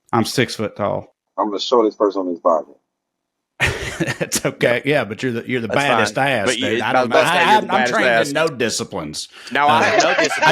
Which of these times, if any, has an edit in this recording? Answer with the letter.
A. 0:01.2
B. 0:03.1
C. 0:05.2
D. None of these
A